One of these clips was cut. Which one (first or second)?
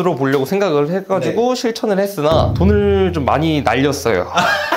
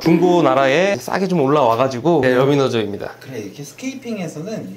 second